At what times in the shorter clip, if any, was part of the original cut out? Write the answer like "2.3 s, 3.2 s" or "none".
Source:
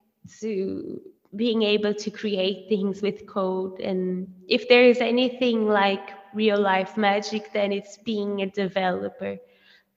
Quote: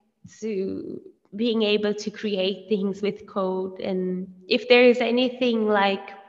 none